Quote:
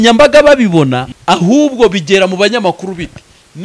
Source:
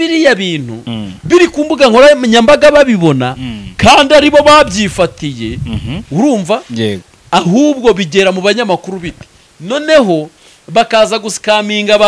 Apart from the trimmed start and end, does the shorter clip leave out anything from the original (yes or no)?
yes